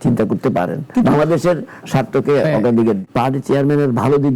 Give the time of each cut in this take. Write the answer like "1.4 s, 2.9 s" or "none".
3.0 s